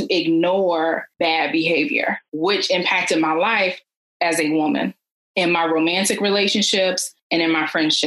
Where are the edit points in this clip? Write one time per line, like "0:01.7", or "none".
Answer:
0:01.1
0:02.3